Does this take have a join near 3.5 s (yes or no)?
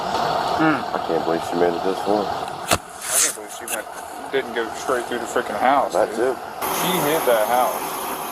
no